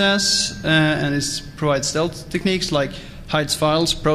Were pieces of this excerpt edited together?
yes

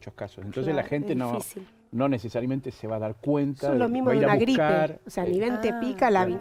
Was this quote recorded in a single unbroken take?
yes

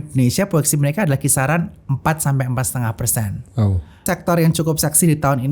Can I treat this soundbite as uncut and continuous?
no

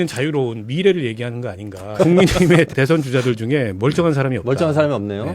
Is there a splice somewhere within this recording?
yes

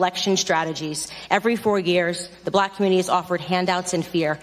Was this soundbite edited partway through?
no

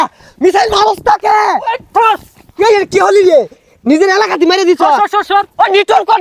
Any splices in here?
no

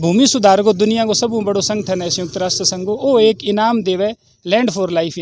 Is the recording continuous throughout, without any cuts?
yes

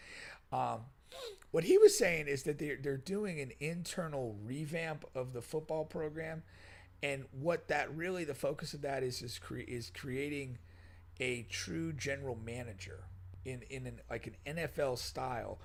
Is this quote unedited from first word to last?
yes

